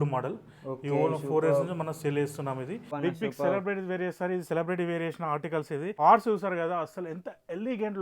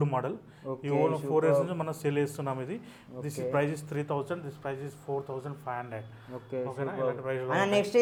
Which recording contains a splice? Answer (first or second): first